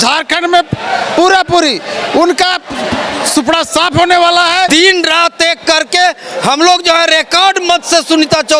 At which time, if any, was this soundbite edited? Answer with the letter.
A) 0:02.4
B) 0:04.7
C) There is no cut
B